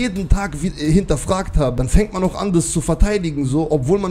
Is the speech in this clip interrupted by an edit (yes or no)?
yes